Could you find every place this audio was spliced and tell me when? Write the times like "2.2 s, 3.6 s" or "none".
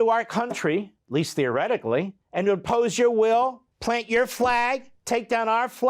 1.0 s, 2.2 s, 3.7 s